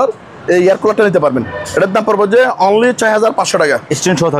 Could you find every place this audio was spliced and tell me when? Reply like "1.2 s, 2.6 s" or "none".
none